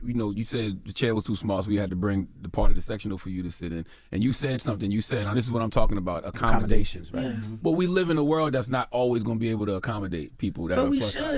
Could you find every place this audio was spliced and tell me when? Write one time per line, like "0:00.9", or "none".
none